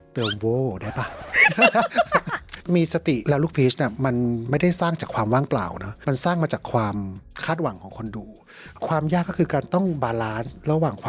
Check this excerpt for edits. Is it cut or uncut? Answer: cut